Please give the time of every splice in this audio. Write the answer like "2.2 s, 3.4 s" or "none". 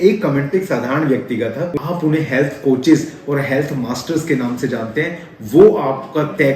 1.7 s

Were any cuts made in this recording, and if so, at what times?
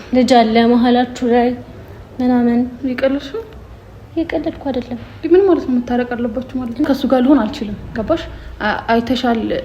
6.8 s

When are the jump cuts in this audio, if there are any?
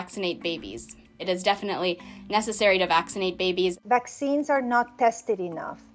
1.2 s, 3.8 s

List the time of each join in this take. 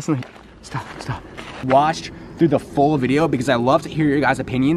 1.6 s

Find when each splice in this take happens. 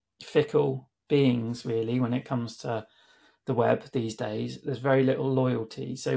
0.9 s

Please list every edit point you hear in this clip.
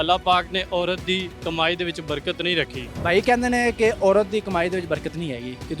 1.3 s, 2.8 s

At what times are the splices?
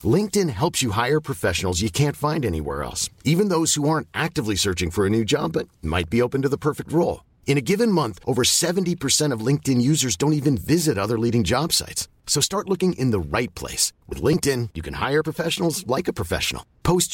none

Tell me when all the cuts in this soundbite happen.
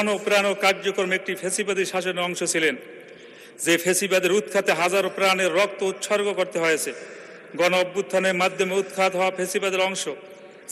none

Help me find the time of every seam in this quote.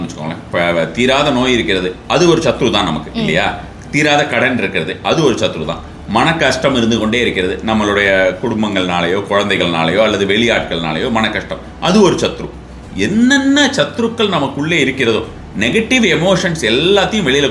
none

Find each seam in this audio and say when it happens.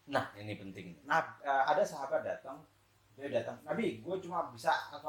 none

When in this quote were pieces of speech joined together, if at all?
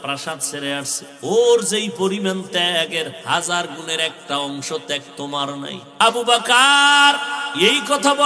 1.0 s, 6.0 s, 7.4 s

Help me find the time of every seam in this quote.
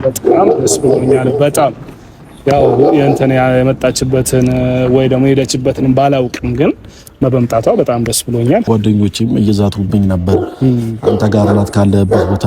8.7 s

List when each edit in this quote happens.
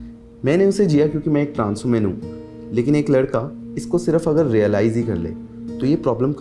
none

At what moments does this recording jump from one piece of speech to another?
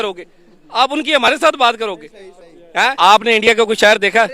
2.9 s

